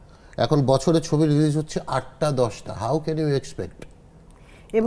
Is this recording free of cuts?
yes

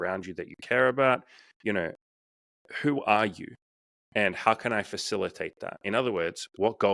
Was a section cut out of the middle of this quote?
no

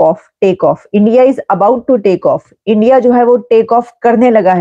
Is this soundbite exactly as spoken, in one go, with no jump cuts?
yes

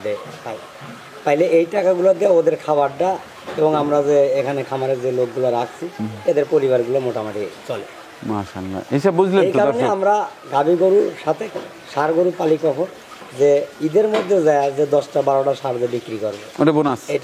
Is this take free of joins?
yes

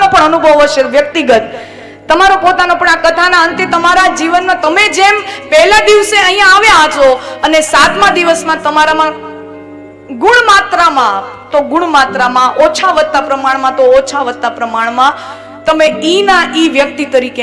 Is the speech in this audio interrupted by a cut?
no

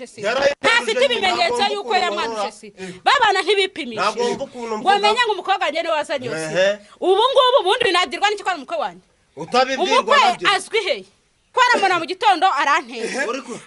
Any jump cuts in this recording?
yes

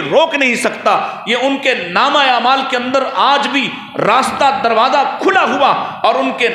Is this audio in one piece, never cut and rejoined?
yes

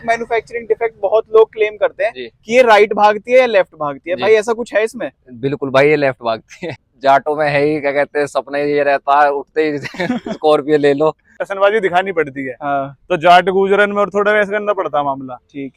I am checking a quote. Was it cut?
yes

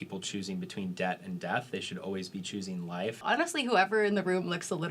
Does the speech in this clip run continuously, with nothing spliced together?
no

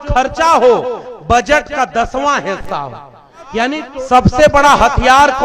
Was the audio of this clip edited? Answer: yes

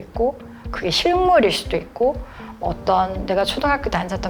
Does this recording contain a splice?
no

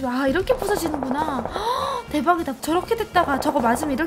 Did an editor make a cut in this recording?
yes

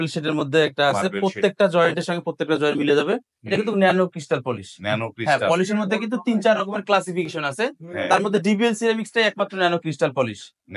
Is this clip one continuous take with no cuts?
yes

